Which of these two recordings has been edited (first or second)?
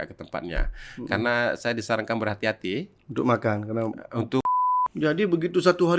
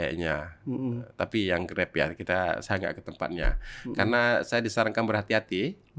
first